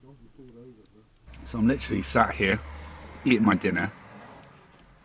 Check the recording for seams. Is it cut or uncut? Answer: cut